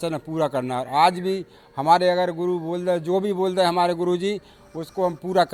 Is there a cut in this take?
no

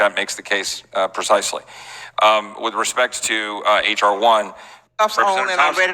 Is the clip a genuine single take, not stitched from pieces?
no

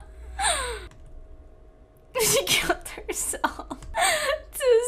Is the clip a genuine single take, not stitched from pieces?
yes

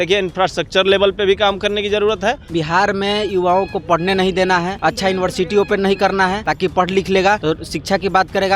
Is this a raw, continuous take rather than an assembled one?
no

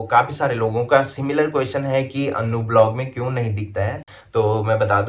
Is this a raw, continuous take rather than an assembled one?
yes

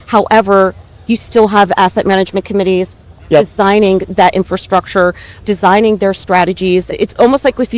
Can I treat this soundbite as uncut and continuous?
no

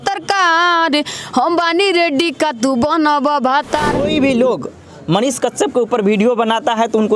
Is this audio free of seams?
no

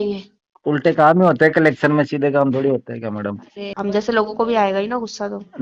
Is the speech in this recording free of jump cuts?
no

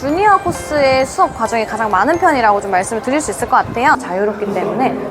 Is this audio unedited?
no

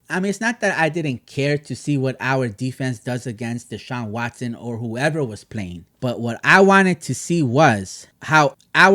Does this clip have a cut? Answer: yes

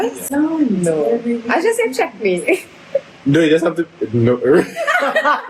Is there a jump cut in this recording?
no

